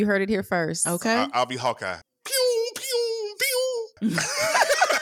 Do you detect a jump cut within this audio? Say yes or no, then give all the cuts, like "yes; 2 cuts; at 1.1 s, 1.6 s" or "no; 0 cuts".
yes; 2 cuts; at 1.9 s, 3.9 s